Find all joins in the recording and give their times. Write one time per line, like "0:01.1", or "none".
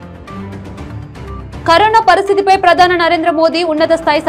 0:01.3

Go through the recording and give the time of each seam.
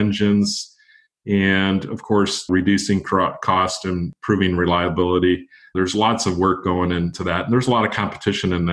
0:02.5
0:04.1
0:05.6
0:07.1

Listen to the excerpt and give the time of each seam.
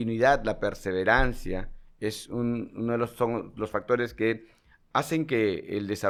none

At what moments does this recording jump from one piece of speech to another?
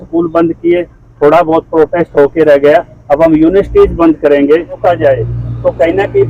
0:04.8

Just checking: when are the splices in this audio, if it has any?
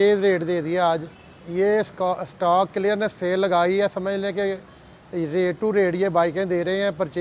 0:01.8

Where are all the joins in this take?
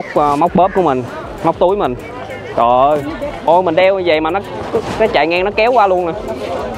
0:03.5

